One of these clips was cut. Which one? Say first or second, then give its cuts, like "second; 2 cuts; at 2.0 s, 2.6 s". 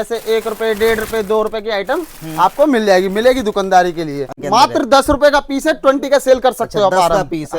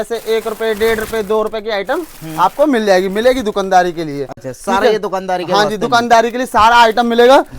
first; 1 cut; at 4.3 s